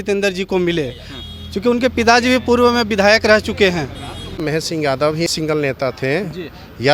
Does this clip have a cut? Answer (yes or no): yes